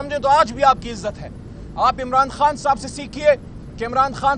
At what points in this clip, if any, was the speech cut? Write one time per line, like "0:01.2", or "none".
none